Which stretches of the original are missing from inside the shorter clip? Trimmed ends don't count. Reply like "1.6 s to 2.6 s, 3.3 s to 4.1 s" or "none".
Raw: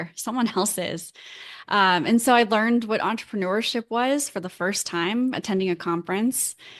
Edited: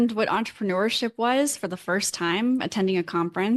none